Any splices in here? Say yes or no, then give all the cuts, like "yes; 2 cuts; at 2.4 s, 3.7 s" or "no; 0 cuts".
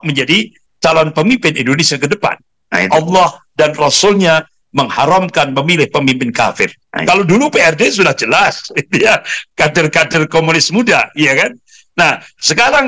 yes; 2 cuts; at 2.9 s, 6.9 s